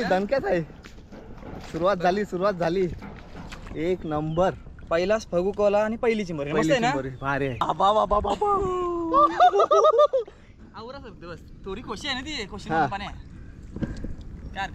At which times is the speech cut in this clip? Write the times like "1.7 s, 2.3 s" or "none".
7.6 s

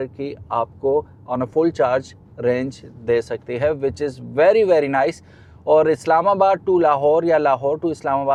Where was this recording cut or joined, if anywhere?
none

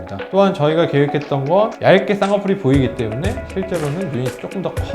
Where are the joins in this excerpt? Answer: 1.8 s

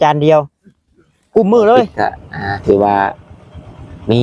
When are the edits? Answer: 1.9 s

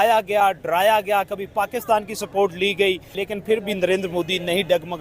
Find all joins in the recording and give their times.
3.2 s

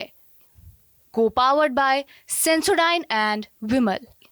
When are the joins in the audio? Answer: none

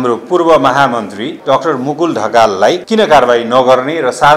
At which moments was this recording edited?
1.3 s, 2.8 s

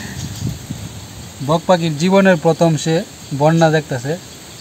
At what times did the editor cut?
none

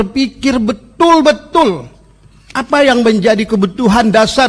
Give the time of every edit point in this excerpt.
none

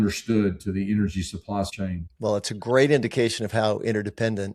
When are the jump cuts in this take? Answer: 1.8 s

